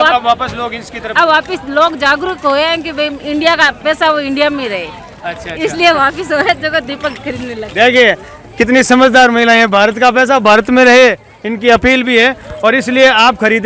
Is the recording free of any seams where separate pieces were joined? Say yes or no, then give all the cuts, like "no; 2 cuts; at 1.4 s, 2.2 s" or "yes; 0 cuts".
yes; 0 cuts